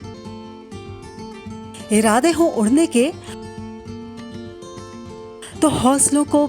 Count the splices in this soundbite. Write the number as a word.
one